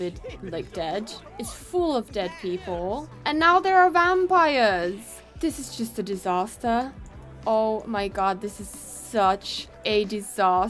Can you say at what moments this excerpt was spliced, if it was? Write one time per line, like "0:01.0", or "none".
none